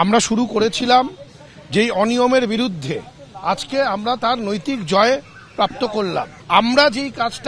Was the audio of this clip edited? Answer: yes; 1 cut; at 6.3 s

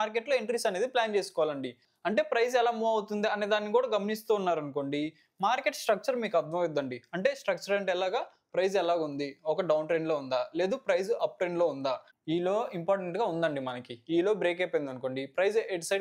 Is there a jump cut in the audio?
yes; 2 cuts; at 1.7 s, 12.1 s

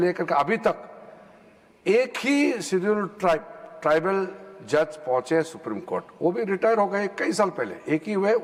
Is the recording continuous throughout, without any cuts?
yes; 0 cuts

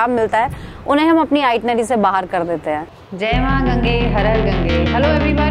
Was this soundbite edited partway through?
yes; 1 cut; at 2.9 s

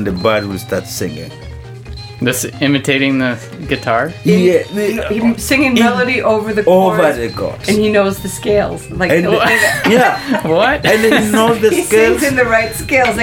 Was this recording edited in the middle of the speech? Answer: no; 0 cuts

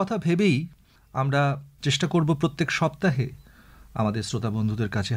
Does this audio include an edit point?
yes; 1 cut; at 1.7 s

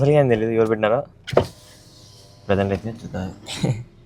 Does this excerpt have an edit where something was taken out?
no; 0 cuts

